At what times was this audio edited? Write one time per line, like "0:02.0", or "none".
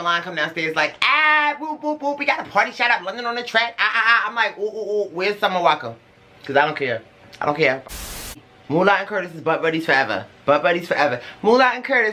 0:08.3